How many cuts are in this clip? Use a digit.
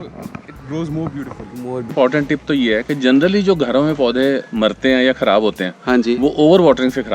1